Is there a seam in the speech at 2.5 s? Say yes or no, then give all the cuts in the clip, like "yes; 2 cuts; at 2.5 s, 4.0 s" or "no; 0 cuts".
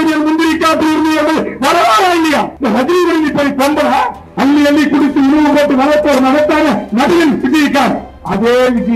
yes; 2 cuts; at 2.5 s, 4.2 s